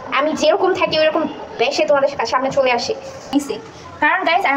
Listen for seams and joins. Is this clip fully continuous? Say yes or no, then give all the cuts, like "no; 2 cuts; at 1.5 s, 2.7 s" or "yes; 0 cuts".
no; 1 cut; at 3.3 s